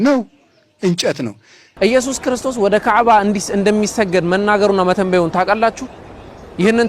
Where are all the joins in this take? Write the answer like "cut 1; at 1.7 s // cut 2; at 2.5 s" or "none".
cut 1; at 1.7 s